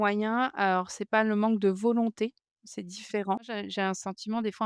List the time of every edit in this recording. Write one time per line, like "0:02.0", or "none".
0:03.6